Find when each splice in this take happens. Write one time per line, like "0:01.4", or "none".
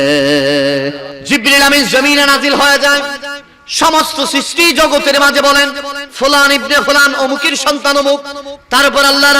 0:01.1